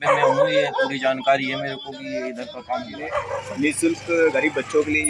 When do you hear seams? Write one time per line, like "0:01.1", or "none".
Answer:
0:03.2